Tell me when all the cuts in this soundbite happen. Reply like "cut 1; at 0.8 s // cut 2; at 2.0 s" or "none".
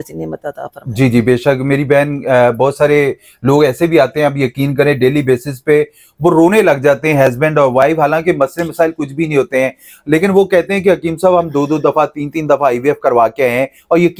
none